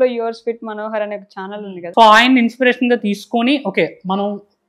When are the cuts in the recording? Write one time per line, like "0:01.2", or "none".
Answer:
0:01.5